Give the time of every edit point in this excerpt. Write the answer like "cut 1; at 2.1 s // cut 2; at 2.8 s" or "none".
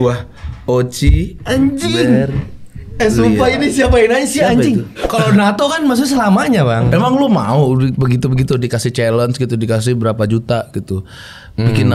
cut 1; at 5.0 s